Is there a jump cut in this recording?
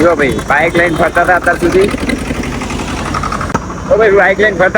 yes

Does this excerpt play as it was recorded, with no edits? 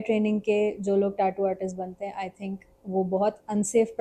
yes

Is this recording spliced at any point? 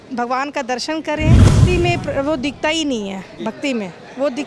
yes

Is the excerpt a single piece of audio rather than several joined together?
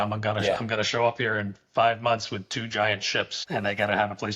no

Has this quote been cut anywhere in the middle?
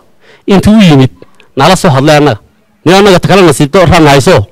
yes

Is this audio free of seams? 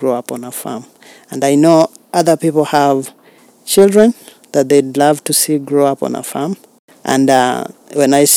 yes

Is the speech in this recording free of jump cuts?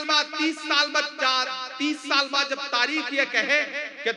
yes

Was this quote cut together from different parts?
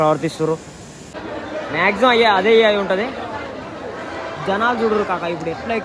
yes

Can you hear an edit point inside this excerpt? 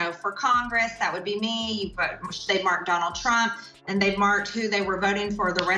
no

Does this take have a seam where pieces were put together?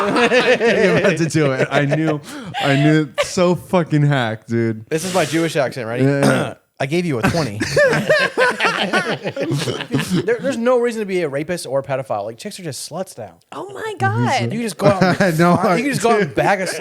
yes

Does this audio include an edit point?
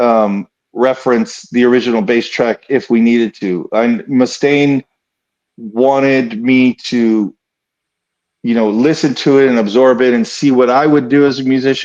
no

